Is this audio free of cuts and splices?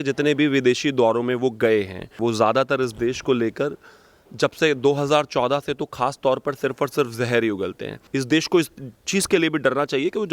no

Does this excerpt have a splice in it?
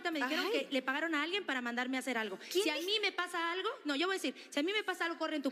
no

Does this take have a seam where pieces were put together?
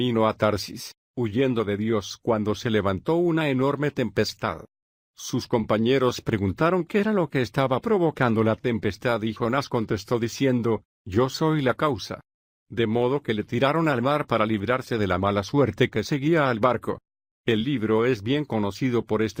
no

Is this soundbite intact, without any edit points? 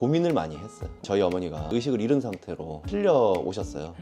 no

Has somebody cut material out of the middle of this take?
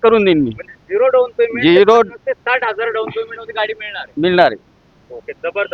no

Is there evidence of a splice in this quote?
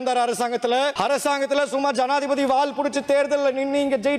yes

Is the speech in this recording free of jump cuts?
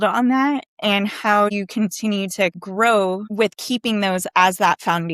no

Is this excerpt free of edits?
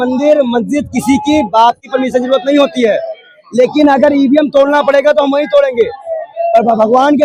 yes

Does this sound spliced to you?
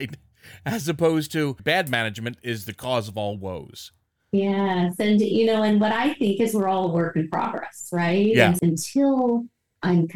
yes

